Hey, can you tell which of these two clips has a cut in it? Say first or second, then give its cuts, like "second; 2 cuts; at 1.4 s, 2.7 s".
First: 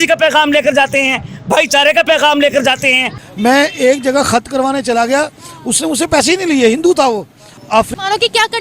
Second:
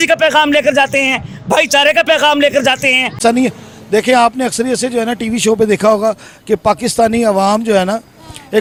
first; 2 cuts; at 3.1 s, 7.9 s